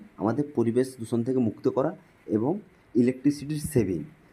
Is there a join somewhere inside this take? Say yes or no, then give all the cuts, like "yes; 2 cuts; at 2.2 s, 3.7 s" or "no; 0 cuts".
no; 0 cuts